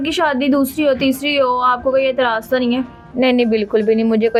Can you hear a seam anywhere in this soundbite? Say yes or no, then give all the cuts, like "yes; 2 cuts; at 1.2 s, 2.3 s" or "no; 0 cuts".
no; 0 cuts